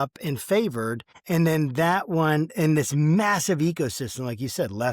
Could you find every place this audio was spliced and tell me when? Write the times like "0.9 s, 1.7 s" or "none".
1.1 s